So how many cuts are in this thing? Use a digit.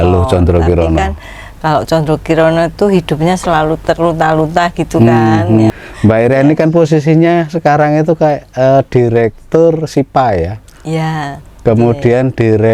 1